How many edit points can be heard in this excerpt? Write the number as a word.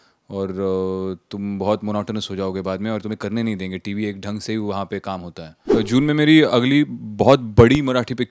one